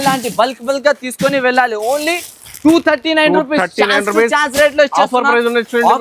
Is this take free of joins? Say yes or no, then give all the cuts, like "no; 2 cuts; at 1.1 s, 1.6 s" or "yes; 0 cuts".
yes; 0 cuts